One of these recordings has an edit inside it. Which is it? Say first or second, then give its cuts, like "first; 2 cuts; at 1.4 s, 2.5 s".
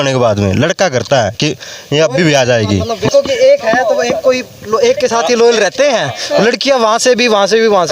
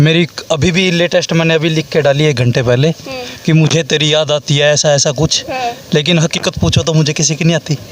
first; 1 cut; at 3.1 s